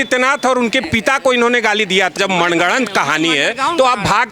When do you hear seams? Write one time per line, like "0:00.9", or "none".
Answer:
0:02.1